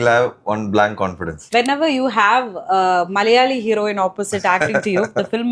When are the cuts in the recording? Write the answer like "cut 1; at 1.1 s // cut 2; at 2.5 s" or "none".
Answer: cut 1; at 1.3 s